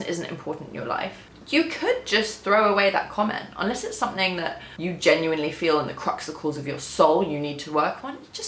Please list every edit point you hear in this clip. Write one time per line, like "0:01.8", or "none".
0:01.3
0:04.7